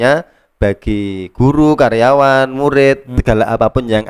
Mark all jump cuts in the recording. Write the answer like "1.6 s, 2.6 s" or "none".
3.1 s